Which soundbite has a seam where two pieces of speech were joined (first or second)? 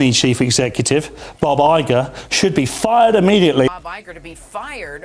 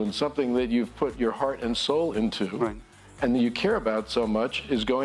first